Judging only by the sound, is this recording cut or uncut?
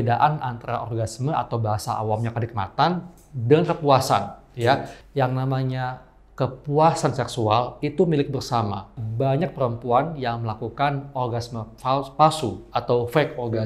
cut